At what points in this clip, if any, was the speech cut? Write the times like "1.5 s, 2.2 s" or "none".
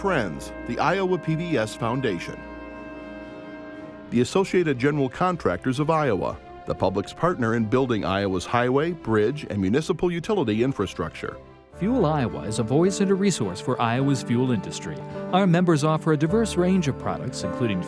2.3 s, 4.1 s